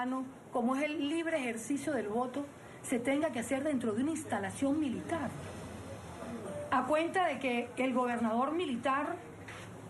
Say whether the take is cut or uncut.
cut